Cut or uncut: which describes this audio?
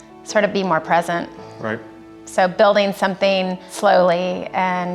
cut